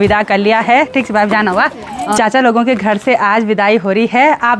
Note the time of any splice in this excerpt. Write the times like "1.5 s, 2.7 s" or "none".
2.2 s